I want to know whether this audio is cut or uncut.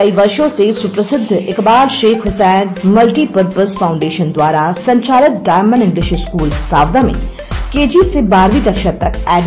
uncut